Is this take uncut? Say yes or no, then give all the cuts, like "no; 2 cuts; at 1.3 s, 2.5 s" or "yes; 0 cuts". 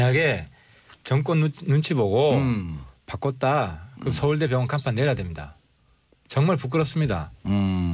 no; 1 cut; at 6.9 s